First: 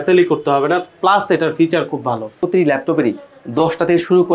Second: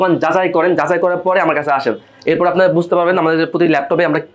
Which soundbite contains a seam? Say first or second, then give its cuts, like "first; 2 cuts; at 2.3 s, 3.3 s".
first; 1 cut; at 2.5 s